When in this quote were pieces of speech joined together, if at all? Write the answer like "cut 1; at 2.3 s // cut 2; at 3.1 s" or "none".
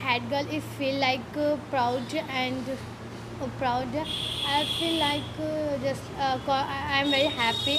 none